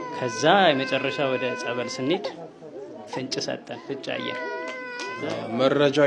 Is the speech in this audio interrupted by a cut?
no; 0 cuts

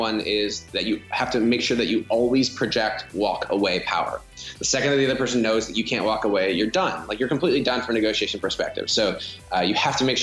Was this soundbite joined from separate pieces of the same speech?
no; 0 cuts

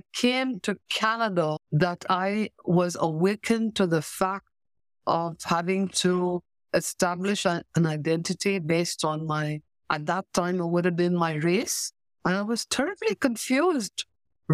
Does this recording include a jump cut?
no; 0 cuts

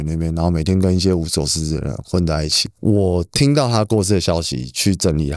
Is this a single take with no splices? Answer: yes; 0 cuts

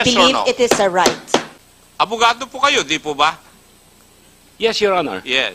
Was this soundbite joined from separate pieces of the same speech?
yes; 1 cut; at 1.5 s

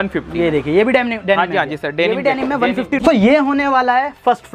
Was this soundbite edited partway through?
yes; 1 cut; at 3.0 s

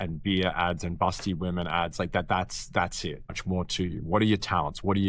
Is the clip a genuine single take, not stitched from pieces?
no; 1 cut; at 3.4 s

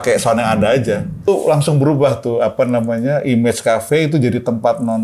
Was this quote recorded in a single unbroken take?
no; 1 cut; at 1.3 s

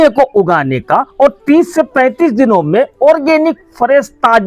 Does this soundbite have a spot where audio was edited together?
no; 0 cuts

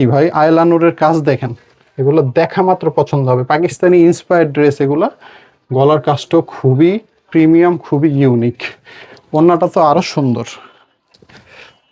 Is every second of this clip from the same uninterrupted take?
yes; 0 cuts

